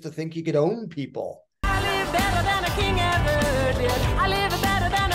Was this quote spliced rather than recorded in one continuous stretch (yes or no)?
yes